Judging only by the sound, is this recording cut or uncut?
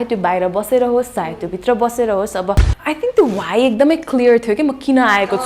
cut